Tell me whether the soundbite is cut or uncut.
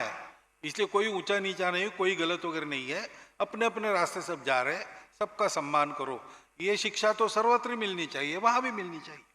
uncut